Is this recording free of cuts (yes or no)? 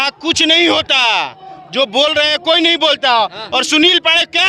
yes